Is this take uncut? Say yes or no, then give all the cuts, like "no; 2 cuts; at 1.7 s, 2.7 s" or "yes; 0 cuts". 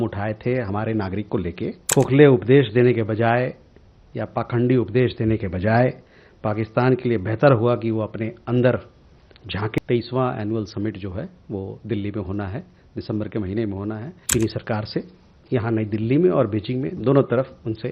no; 3 cuts; at 1.8 s, 9.8 s, 14.1 s